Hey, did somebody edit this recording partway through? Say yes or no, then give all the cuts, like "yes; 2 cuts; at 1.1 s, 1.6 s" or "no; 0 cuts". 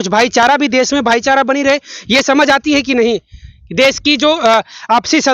no; 0 cuts